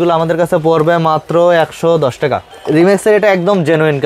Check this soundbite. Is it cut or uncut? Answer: cut